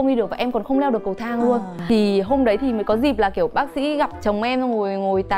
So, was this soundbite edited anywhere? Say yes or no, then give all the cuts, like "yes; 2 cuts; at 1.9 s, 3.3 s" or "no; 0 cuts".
yes; 1 cut; at 1.8 s